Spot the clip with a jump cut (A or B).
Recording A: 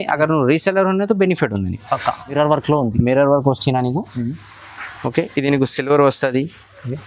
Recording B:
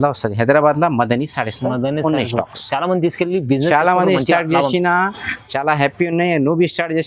A